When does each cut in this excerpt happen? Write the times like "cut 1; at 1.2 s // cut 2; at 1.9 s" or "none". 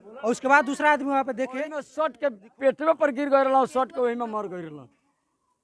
cut 1; at 1.9 s

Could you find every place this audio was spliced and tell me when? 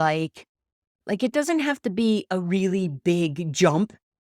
cut 1; at 0.9 s

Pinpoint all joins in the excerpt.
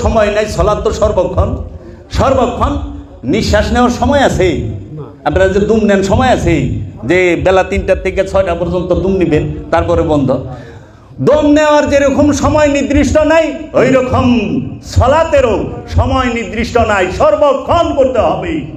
none

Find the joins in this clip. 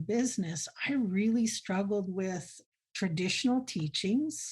cut 1; at 2.5 s

